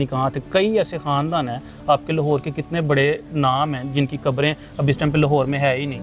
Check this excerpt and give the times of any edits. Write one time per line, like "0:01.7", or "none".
none